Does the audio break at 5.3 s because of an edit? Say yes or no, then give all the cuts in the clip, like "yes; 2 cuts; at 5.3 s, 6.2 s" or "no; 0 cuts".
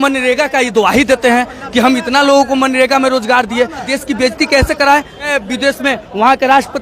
yes; 2 cuts; at 3.9 s, 5.3 s